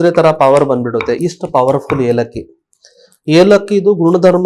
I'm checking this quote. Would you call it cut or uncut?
uncut